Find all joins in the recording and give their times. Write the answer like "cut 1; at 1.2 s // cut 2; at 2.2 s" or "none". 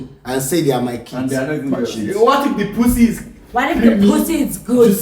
cut 1; at 2.0 s